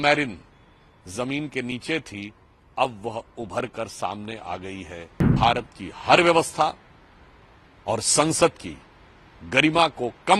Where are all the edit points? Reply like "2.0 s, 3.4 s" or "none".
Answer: 5.3 s